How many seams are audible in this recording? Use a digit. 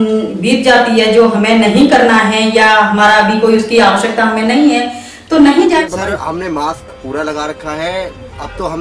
1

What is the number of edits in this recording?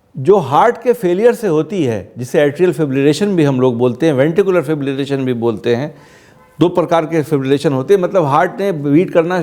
0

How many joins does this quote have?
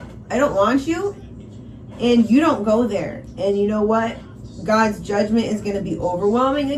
0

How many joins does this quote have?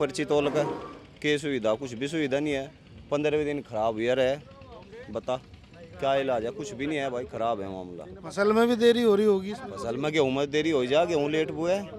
0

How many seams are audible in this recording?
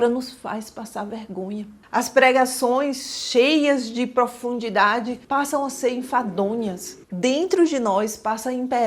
1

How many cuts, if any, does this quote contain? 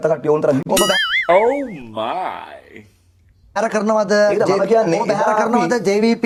0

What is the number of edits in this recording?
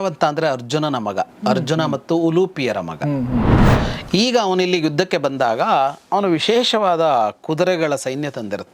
1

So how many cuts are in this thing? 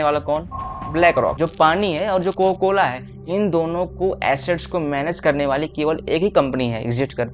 1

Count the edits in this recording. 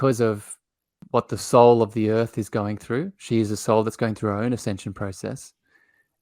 1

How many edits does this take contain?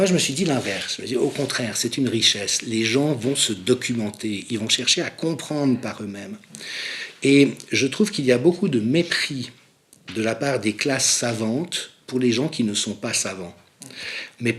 0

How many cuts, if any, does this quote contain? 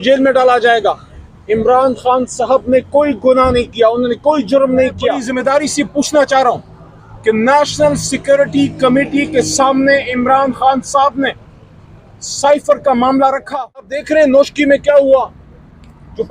2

